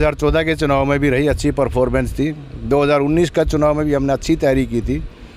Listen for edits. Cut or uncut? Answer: uncut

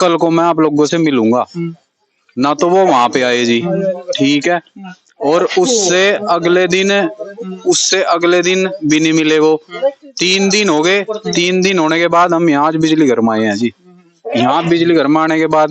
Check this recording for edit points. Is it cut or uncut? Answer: uncut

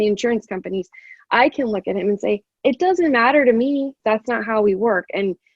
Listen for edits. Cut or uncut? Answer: cut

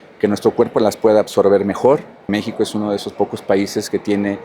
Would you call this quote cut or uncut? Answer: cut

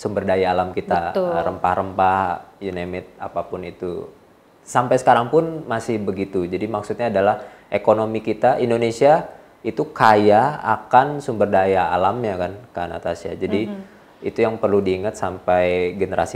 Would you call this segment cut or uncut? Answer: uncut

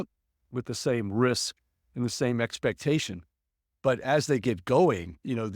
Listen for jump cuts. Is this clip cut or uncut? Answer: uncut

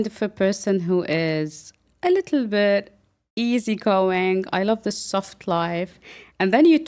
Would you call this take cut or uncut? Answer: uncut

